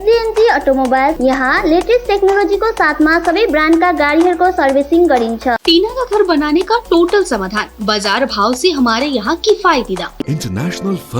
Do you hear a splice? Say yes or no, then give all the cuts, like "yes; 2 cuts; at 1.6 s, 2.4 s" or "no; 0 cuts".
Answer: yes; 3 cuts; at 1.2 s, 5.6 s, 10.2 s